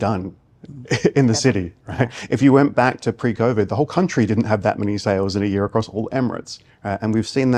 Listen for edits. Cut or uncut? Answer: uncut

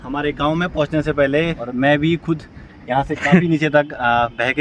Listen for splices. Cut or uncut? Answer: cut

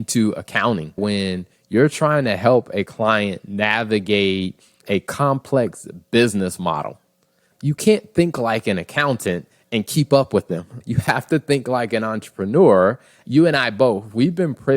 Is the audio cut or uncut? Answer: cut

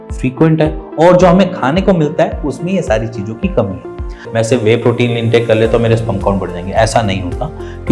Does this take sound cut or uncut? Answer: cut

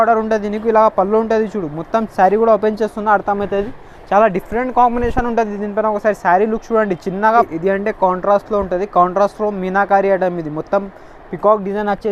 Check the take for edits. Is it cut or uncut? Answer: cut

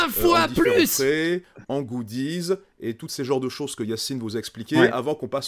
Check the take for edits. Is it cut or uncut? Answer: uncut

